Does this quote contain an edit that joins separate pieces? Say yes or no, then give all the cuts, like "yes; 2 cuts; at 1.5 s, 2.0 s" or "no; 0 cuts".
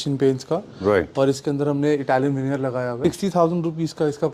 yes; 1 cut; at 3.0 s